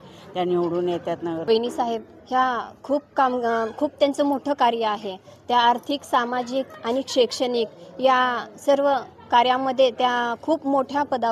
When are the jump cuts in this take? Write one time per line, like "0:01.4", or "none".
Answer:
0:01.4